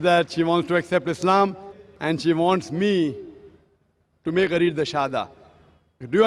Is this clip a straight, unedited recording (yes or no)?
yes